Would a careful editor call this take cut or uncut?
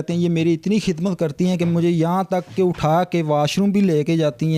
uncut